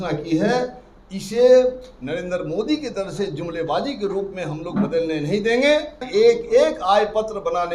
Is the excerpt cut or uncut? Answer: cut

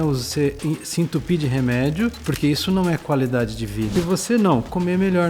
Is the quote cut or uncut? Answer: cut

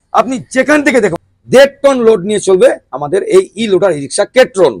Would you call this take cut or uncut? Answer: cut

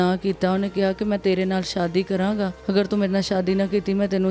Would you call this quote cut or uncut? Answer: cut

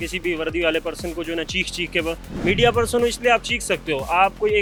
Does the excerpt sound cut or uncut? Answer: uncut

